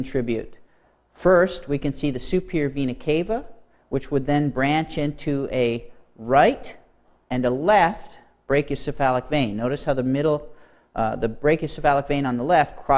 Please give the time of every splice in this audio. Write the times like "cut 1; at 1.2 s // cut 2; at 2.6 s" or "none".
cut 1; at 1.6 s